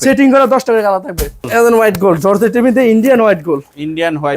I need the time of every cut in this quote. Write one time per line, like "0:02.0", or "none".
0:01.5